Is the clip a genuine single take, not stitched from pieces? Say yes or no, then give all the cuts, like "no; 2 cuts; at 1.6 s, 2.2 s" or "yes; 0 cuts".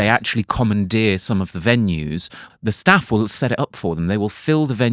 no; 1 cut; at 2.4 s